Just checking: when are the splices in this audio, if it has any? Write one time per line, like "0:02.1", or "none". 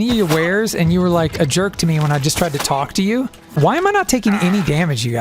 0:03.5

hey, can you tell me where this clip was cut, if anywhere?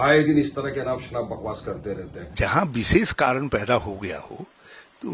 0:02.2

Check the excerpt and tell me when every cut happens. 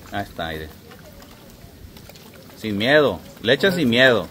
none

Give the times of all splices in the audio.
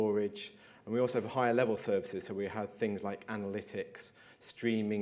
none

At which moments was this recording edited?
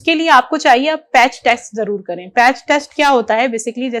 none

